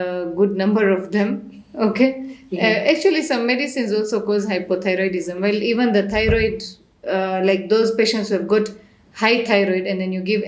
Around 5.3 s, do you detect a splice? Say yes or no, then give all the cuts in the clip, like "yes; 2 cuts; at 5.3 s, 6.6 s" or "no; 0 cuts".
no; 0 cuts